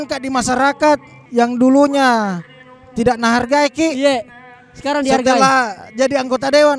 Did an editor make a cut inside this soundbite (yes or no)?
yes